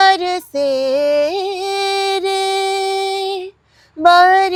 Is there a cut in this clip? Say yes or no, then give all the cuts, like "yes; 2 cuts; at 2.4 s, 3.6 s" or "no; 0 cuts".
no; 0 cuts